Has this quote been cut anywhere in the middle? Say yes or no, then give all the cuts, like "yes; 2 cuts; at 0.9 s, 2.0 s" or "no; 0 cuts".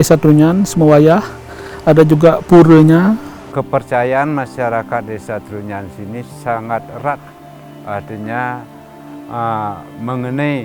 yes; 1 cut; at 3.4 s